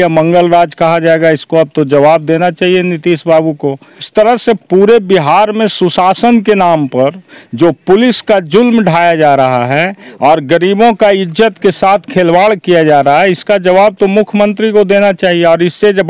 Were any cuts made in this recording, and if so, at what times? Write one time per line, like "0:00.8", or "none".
0:04.1